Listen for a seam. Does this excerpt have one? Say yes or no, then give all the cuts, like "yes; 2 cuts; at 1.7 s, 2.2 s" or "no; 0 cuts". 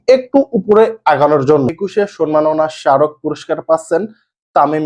yes; 1 cut; at 1.8 s